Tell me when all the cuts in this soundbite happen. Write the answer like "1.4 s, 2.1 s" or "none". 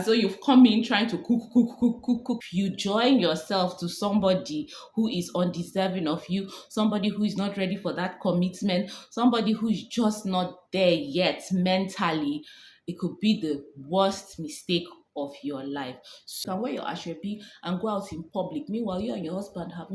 2.4 s, 16.4 s